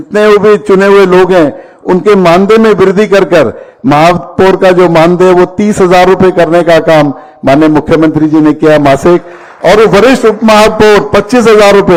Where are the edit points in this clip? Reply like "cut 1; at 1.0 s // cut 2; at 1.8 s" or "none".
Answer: none

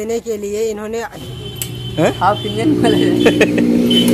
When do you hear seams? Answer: cut 1; at 1.2 s

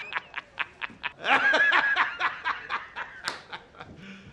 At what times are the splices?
none

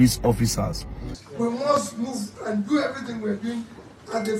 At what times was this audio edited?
cut 1; at 1.2 s

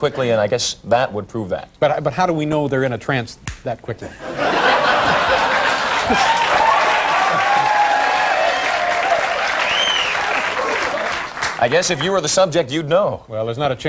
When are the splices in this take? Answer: cut 1; at 4.7 s

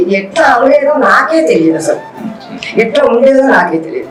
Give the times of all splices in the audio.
none

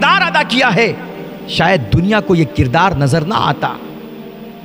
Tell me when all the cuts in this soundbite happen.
none

